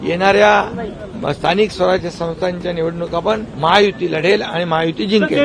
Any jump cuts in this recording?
yes; 1 cut; at 3.5 s

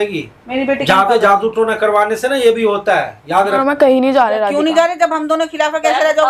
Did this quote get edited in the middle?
yes; 1 cut; at 3.6 s

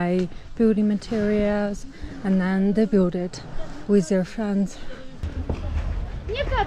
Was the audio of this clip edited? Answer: yes; 1 cut; at 5.3 s

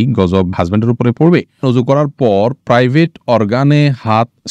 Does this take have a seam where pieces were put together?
yes; 1 cut; at 1.6 s

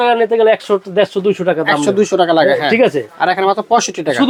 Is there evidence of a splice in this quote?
no; 0 cuts

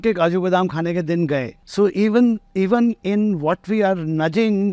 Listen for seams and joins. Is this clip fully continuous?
no; 1 cut; at 1.6 s

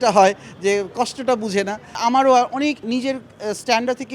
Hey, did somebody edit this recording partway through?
yes; 2 cuts; at 1.9 s, 2.8 s

